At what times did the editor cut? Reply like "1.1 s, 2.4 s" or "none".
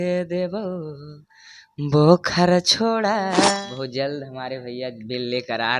3.6 s